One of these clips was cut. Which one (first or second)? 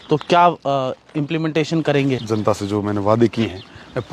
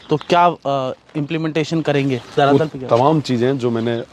first